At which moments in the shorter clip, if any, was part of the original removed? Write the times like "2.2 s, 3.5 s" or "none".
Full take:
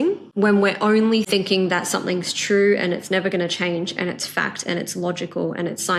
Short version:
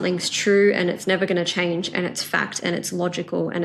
none